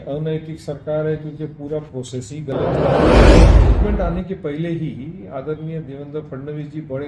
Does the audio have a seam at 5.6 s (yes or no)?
no